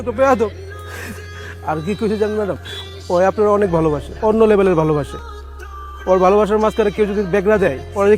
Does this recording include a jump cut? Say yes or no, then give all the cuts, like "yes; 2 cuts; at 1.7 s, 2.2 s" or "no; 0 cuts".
no; 0 cuts